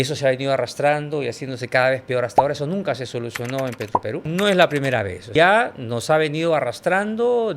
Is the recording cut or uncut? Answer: cut